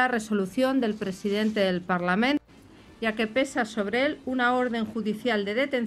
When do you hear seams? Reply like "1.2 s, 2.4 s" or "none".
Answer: 2.4 s

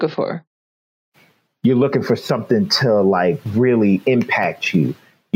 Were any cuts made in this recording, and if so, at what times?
none

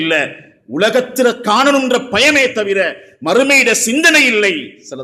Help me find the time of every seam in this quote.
none

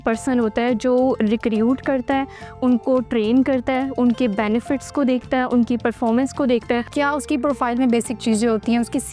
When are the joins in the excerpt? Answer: 6.9 s

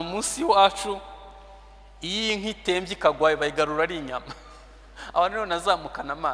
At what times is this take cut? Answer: none

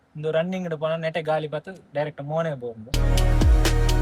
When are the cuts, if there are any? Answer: 2.9 s

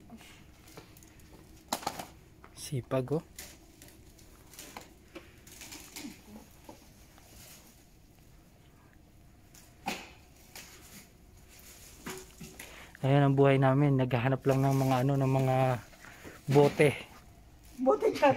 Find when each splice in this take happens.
none

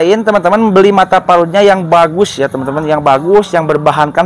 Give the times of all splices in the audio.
none

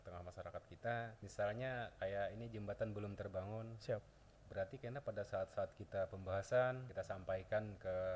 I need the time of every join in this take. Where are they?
1.2 s, 6.9 s

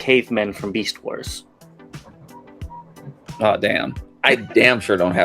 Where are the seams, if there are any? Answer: 4.0 s

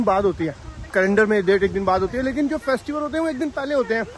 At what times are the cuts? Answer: 0.9 s

